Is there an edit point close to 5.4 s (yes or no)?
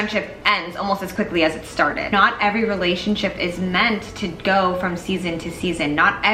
no